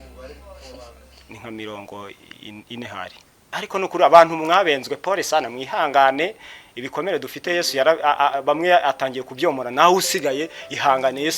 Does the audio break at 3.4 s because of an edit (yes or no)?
yes